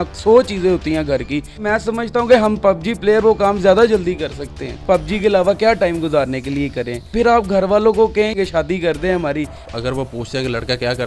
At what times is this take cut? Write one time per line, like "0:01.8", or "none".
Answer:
0:01.6
0:04.8
0:07.0
0:08.3
0:09.6